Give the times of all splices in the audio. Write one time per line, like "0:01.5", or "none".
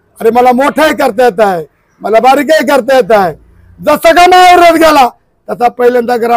none

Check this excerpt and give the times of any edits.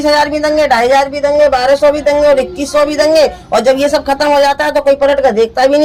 none

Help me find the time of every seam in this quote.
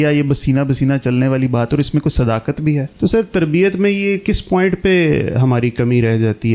0:02.9

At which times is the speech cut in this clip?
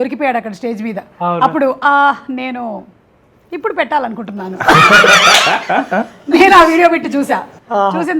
none

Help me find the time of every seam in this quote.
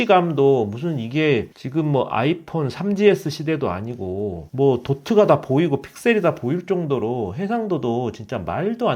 0:04.4

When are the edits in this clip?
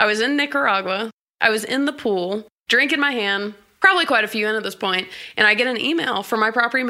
0:01.1
0:02.5
0:03.6

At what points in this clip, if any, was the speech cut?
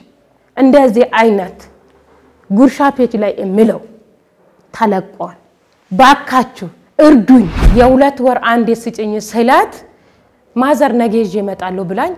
0:07.6

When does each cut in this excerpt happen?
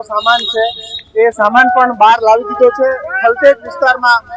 none

